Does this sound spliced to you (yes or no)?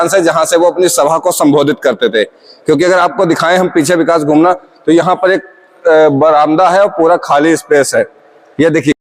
no